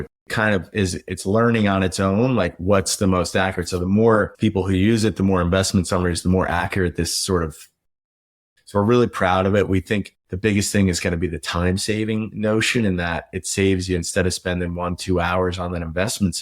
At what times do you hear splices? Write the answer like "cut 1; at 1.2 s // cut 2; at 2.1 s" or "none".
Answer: cut 1; at 8.2 s